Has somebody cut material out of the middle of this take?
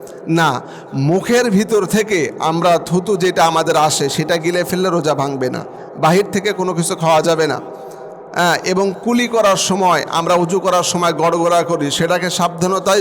no; 0 cuts

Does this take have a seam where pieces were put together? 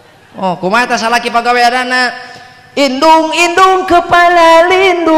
no; 0 cuts

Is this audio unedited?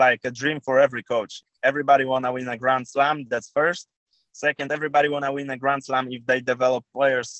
no; 1 cut; at 1.4 s

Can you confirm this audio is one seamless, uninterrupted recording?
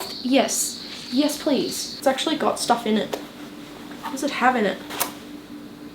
no; 2 cuts; at 1.8 s, 4.9 s

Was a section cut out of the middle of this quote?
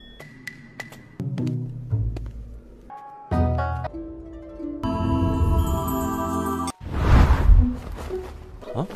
yes; 1 cut; at 6.8 s

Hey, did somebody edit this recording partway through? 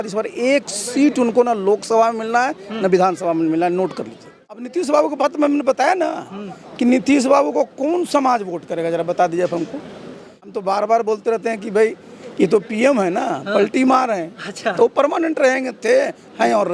yes; 2 cuts; at 4.6 s, 10.5 s

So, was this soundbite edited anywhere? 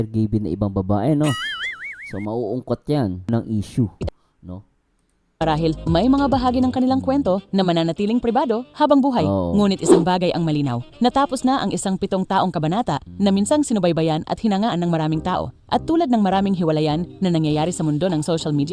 yes; 1 cut; at 3.3 s

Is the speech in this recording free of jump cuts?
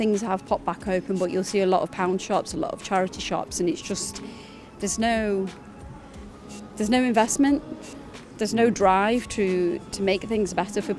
yes; 0 cuts

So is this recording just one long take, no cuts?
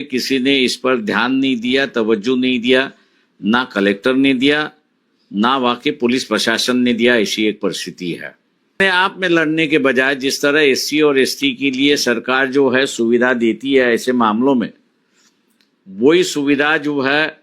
no; 1 cut; at 8.8 s

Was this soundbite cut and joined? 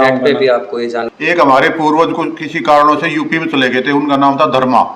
yes; 1 cut; at 1.1 s

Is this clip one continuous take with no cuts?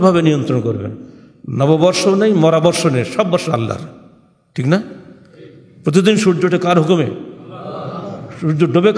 yes; 0 cuts

